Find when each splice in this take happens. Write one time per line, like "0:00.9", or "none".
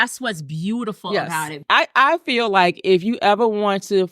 0:01.5